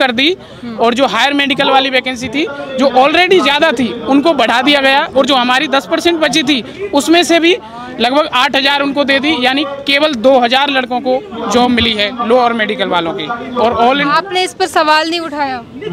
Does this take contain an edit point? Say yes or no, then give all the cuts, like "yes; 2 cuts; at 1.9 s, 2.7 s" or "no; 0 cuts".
no; 0 cuts